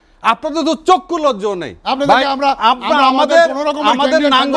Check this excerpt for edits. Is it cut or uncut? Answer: uncut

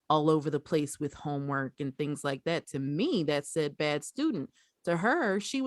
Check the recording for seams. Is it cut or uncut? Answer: uncut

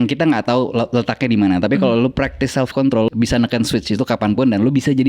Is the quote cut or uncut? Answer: cut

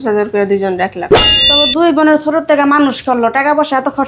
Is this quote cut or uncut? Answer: cut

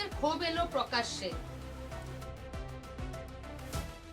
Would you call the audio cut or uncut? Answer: cut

